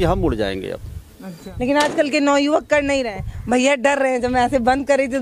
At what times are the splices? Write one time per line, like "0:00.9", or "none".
0:01.4